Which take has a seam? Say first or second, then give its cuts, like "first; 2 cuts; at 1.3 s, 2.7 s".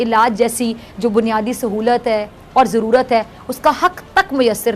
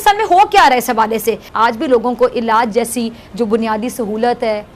second; 1 cut; at 1.5 s